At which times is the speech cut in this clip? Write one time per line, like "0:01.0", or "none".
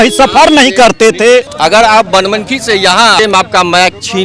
0:01.5
0:03.2